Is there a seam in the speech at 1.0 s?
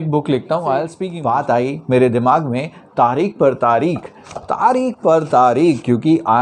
yes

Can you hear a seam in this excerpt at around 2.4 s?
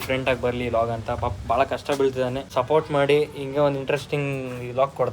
yes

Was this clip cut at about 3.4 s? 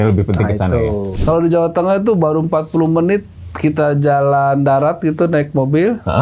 no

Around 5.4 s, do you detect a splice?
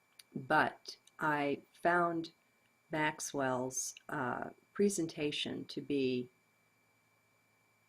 yes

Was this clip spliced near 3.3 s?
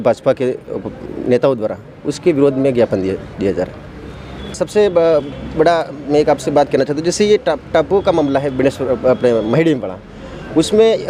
no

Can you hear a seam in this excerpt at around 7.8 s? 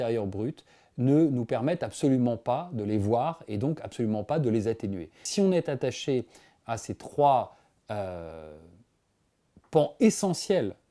no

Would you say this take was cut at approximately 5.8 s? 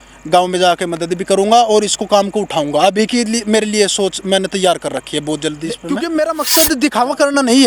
yes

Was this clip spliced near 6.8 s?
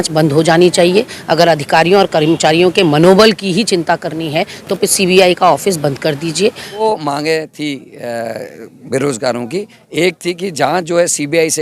yes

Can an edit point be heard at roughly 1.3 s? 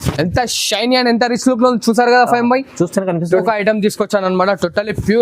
no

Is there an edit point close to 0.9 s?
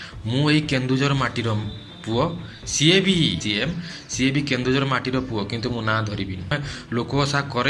no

